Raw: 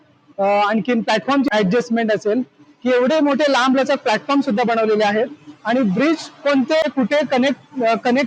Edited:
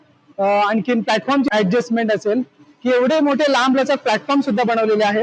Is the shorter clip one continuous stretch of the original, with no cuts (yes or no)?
yes